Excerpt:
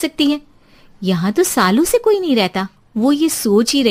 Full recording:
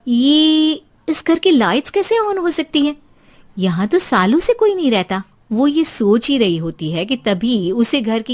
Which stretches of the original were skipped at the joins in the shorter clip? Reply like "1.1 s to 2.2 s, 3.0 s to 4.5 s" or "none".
none